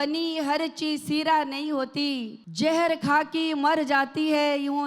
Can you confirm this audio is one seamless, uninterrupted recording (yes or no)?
no